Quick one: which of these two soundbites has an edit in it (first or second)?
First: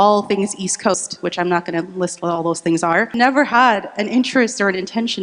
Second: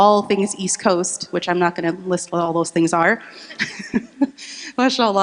first